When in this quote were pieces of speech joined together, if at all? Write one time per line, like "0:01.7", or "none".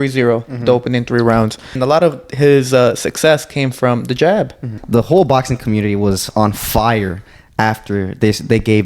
0:01.8
0:04.7